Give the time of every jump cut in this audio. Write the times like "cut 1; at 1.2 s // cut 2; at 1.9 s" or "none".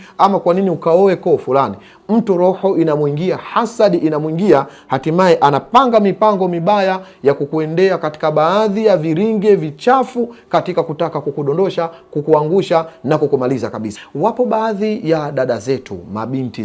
cut 1; at 13.9 s